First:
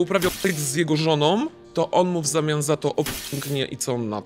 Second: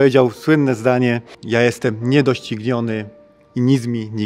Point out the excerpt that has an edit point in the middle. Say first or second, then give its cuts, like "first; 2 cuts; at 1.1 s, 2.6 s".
second; 1 cut; at 1.3 s